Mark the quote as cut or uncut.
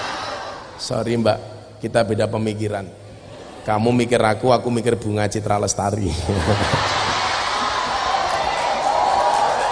uncut